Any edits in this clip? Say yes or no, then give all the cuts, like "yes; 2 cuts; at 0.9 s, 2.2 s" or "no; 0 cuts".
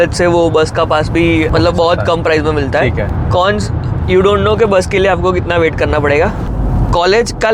yes; 3 cuts; at 1.5 s, 3.2 s, 6.4 s